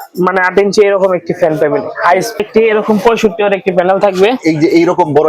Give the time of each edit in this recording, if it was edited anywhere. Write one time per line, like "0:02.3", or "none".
0:02.4

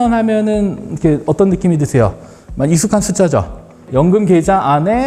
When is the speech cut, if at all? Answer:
0:03.8

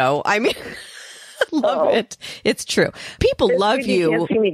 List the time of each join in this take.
0:01.5
0:03.2

